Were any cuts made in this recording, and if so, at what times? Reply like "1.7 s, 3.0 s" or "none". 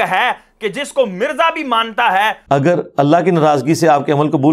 2.4 s